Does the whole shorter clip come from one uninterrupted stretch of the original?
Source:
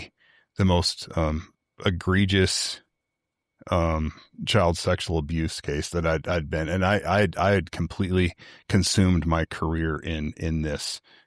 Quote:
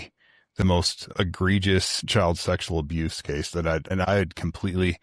no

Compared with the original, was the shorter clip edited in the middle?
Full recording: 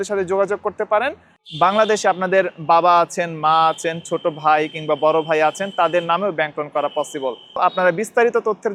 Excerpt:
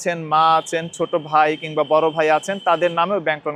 no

